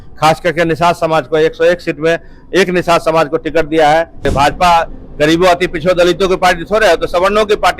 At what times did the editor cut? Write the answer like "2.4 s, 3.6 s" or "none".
4.2 s